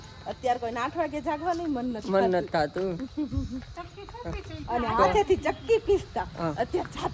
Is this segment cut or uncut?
uncut